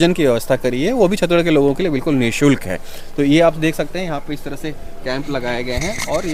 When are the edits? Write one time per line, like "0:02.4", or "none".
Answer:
none